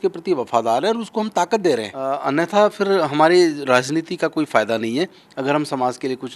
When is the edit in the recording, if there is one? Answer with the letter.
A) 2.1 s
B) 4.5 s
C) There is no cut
A